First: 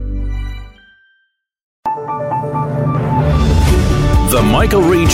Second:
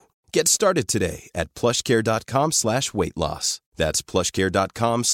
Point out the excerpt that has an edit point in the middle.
first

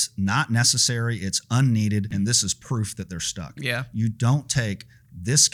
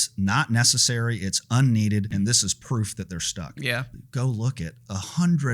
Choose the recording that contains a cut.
second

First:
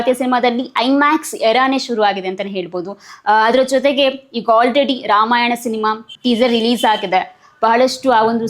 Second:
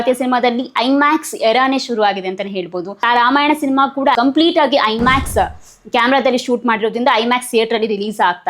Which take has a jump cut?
second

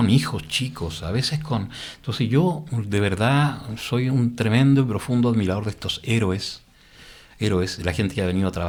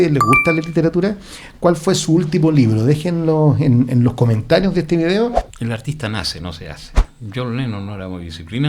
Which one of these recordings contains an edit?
second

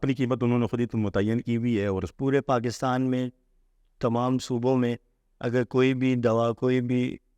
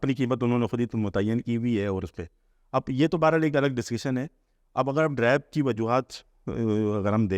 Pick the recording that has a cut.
first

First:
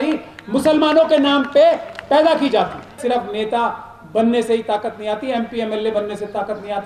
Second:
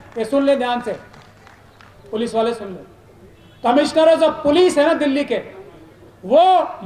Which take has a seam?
first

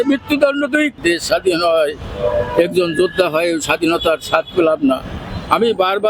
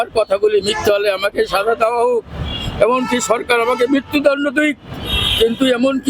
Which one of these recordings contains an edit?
first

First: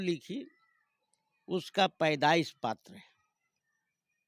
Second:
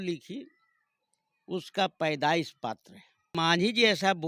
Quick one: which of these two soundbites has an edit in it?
second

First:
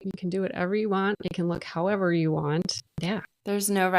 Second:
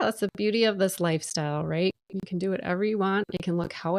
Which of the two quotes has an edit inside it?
first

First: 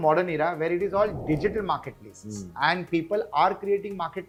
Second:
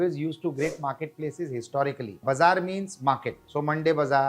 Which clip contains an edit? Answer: second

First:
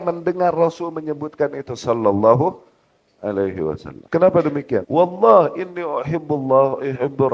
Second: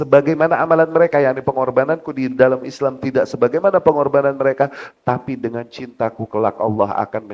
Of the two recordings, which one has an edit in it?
first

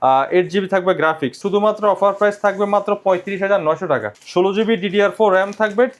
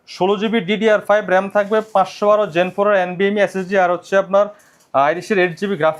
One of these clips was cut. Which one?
first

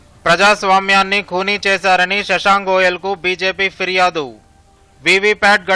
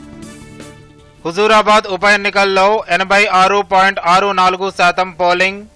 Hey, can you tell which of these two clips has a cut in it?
second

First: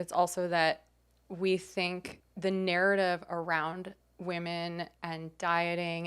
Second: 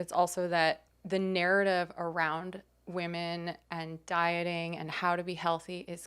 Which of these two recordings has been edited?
second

